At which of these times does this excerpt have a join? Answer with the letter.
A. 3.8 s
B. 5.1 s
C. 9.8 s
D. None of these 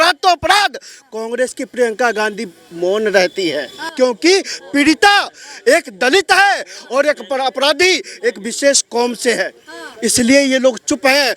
A